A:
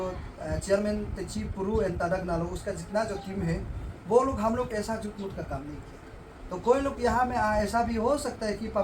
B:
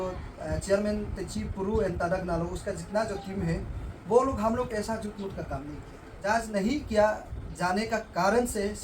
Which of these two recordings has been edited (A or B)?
B